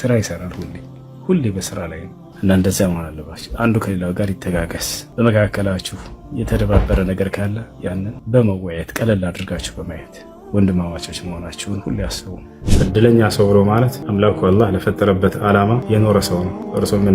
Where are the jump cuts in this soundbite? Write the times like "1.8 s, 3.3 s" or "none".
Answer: 12.6 s